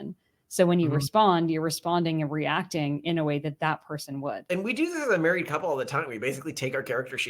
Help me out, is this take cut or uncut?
cut